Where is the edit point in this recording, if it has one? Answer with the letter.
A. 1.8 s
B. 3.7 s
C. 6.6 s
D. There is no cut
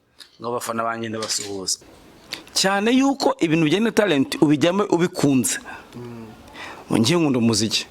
A